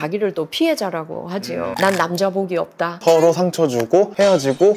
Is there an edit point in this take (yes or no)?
yes